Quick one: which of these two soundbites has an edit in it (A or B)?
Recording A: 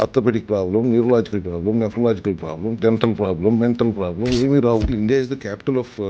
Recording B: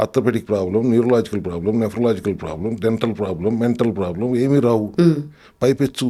A